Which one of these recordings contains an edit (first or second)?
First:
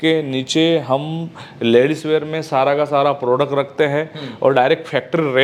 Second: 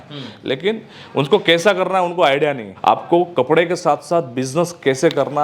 second